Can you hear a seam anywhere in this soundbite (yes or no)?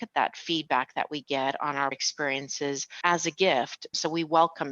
yes